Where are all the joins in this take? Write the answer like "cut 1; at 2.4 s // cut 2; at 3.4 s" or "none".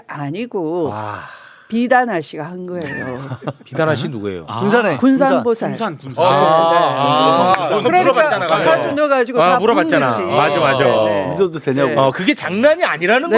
none